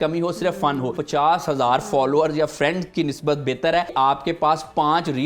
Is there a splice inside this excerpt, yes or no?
yes